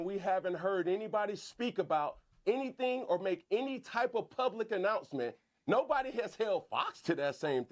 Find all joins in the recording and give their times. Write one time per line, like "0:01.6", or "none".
none